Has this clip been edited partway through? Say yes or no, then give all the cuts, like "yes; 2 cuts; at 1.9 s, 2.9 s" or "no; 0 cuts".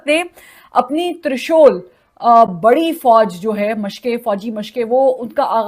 no; 0 cuts